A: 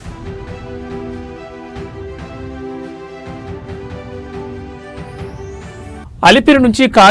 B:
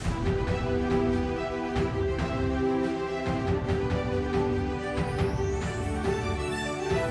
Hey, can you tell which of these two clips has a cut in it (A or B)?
A